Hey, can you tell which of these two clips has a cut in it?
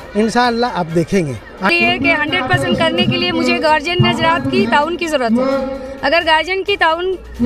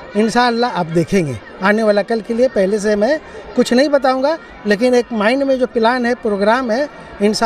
first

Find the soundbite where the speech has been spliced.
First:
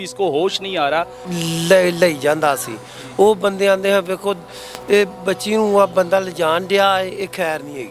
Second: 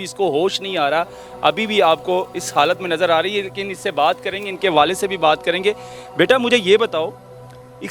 first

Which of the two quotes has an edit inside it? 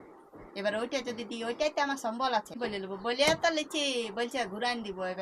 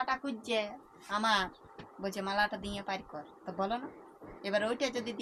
first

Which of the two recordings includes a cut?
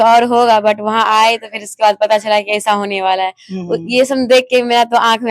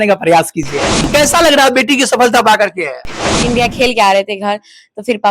second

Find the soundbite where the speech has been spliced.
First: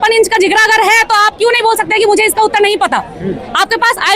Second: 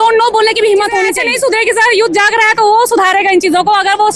second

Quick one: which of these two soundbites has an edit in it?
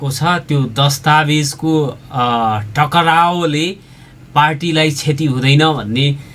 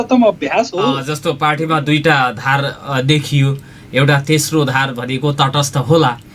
second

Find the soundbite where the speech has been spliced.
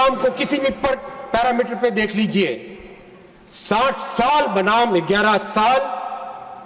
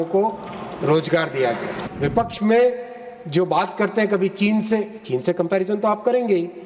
second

